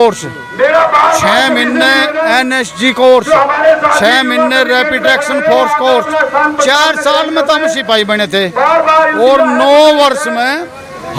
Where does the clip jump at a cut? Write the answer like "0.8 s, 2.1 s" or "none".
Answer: none